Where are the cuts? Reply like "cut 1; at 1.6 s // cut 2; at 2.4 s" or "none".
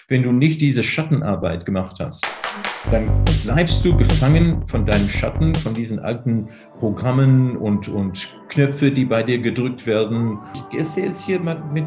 cut 1; at 10.6 s